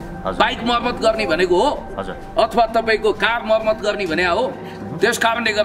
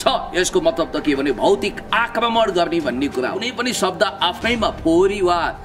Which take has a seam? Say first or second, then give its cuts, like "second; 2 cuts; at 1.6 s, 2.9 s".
second; 1 cut; at 3.5 s